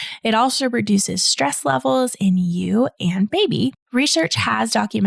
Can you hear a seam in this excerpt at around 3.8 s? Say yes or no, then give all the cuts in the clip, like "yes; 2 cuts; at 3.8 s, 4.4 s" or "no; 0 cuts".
yes; 1 cut; at 3.8 s